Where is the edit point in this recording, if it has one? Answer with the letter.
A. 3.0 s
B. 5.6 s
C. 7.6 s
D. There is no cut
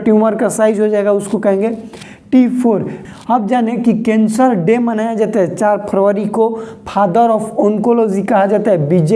A